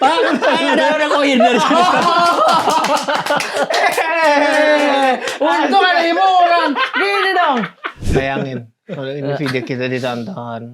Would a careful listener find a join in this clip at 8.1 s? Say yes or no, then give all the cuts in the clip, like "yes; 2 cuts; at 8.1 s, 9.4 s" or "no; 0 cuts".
yes; 1 cut; at 8.1 s